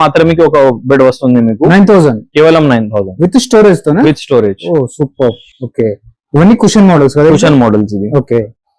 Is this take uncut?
yes; 0 cuts

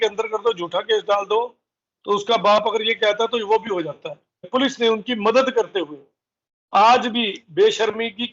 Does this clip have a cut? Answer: yes; 1 cut; at 4.5 s

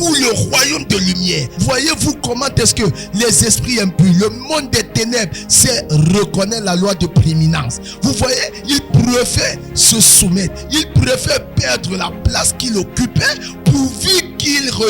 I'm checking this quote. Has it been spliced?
yes; 1 cut; at 1.5 s

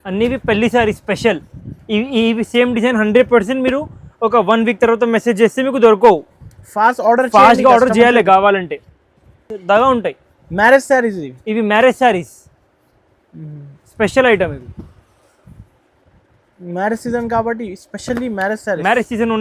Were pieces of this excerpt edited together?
no; 0 cuts

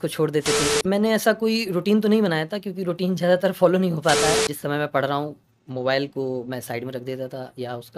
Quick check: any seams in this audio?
yes; 2 cuts; at 0.8 s, 4.5 s

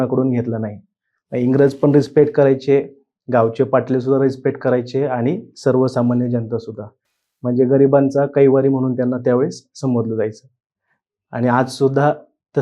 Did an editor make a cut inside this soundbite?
no; 0 cuts

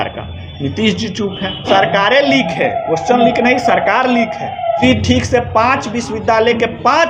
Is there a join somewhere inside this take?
yes; 2 cuts; at 1.7 s, 4.8 s

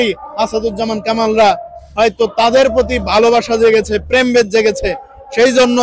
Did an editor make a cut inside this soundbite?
no; 0 cuts

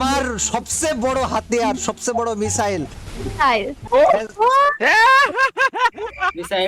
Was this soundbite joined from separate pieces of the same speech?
no; 0 cuts

